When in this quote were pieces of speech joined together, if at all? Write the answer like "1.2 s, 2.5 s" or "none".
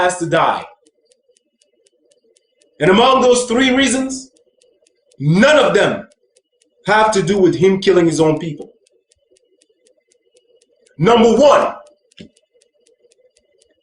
3.6 s